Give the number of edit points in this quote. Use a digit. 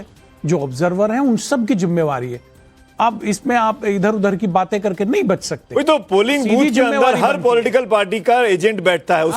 1